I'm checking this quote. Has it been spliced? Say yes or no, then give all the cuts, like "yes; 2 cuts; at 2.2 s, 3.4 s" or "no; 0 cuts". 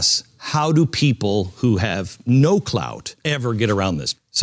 no; 0 cuts